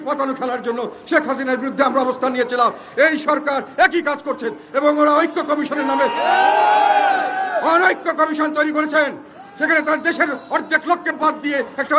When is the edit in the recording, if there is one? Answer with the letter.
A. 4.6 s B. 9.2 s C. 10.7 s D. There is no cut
D